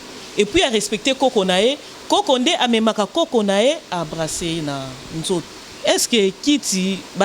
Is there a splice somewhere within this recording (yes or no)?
yes